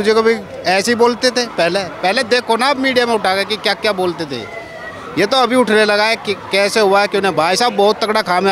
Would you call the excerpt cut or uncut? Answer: uncut